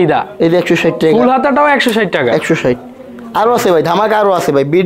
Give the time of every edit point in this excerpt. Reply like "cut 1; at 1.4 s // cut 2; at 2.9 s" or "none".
none

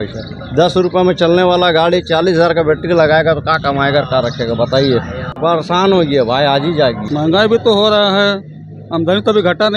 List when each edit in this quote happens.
cut 1; at 5.2 s // cut 2; at 7.0 s

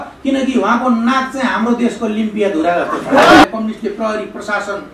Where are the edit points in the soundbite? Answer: cut 1; at 3.4 s

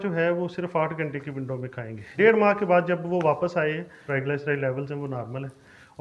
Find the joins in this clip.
cut 1; at 2.0 s // cut 2; at 4.0 s

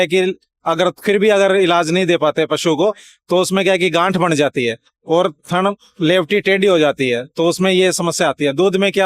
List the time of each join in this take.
none

